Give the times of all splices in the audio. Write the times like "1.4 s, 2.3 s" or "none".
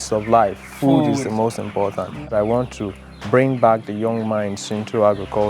2.2 s